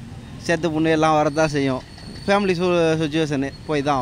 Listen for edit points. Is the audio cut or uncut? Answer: uncut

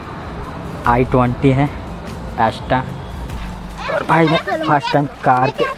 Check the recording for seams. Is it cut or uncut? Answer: cut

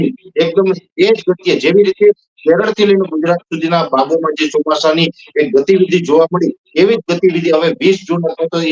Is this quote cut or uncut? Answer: uncut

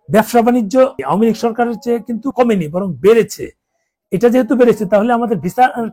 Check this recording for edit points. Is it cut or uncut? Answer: cut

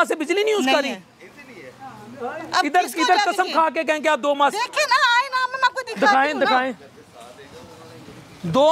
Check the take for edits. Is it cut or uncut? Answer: uncut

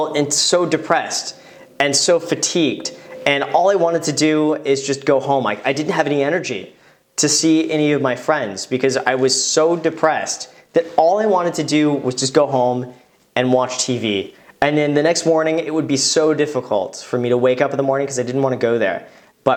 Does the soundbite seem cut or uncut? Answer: uncut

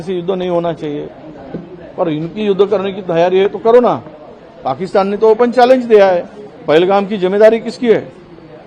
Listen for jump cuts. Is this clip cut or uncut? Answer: cut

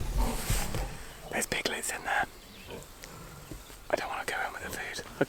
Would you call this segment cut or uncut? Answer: uncut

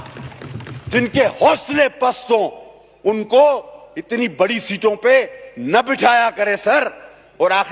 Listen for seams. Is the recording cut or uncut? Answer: uncut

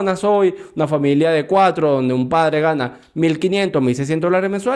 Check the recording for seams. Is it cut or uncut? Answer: uncut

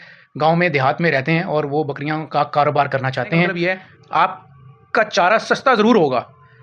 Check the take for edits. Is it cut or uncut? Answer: cut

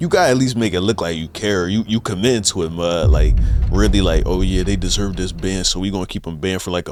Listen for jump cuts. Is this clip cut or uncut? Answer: uncut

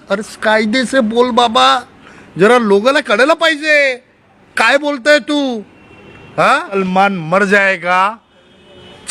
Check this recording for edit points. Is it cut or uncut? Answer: cut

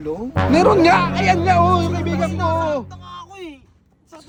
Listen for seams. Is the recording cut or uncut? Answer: uncut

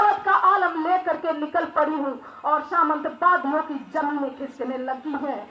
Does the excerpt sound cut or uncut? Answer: uncut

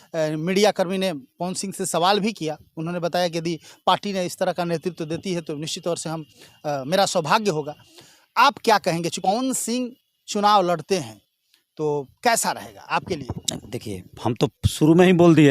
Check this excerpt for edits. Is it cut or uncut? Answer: cut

